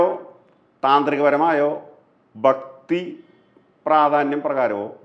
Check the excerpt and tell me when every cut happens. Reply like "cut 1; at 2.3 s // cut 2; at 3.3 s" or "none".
none